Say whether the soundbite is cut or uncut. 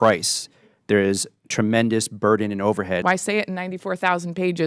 cut